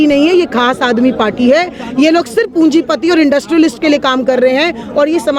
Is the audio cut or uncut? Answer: uncut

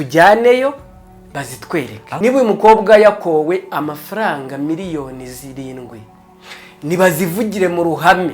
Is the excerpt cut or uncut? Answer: cut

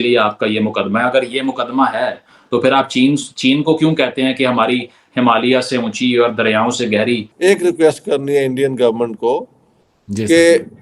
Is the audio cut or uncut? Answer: cut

